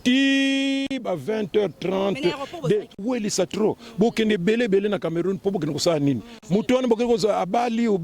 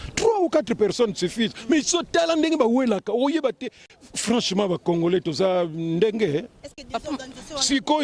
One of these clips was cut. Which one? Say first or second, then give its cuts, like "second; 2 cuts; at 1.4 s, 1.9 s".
first; 1 cut; at 3.0 s